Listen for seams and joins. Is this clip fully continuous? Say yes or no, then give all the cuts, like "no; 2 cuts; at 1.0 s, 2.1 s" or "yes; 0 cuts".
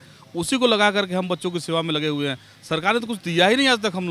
yes; 0 cuts